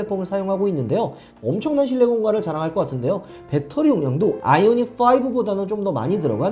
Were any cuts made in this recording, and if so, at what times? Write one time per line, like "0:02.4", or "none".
0:01.3

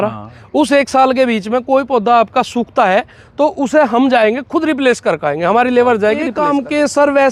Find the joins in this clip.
0:06.4

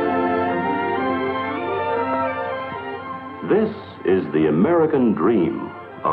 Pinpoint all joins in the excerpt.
none

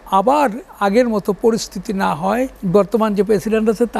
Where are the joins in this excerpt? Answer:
0:02.6

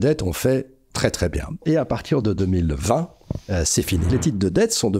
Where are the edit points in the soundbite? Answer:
0:01.6
0:04.1

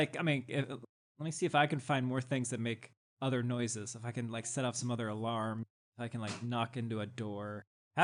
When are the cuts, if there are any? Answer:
none

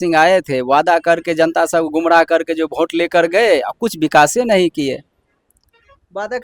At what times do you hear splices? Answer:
none

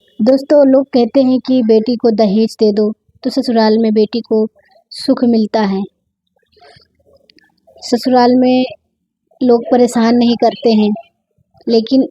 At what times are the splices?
none

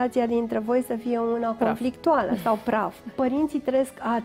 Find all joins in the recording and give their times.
0:03.0

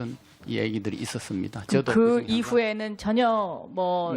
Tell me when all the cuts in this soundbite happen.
none

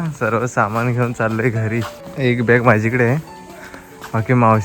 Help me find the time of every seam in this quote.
0:02.1

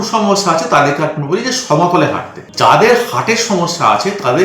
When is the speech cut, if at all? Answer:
0:02.4

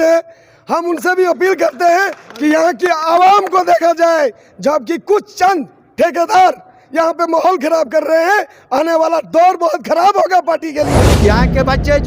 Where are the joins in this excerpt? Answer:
0:11.1

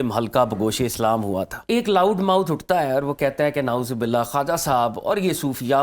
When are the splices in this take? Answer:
0:01.6

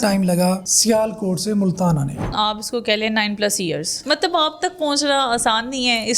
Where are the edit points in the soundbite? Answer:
0:02.3
0:04.0

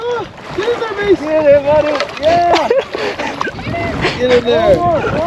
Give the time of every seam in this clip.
none

